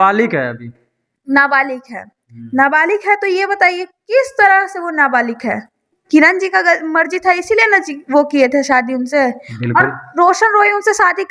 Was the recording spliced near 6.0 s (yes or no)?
yes